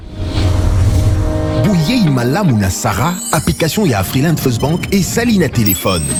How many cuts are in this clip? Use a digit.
0